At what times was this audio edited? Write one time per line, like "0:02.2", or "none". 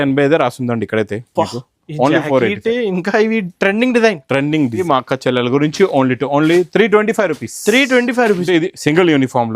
0:04.8
0:08.5